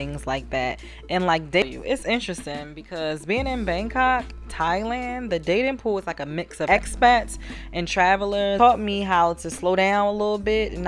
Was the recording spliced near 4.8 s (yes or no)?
no